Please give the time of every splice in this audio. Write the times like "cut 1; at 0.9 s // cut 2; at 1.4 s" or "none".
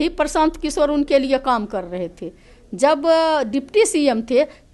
none